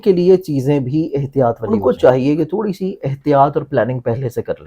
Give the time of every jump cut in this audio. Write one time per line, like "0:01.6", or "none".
0:01.7